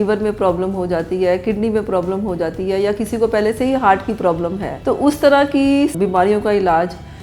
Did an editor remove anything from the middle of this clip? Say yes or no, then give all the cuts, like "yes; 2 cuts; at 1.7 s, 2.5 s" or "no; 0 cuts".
yes; 2 cuts; at 4.7 s, 5.9 s